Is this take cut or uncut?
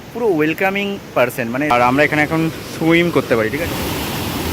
cut